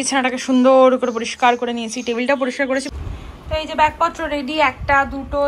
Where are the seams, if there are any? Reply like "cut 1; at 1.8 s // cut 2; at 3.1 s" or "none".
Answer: cut 1; at 2.9 s